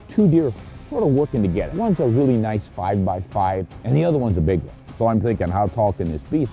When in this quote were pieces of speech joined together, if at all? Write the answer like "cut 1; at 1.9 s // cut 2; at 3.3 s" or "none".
cut 1; at 1.7 s // cut 2; at 3.7 s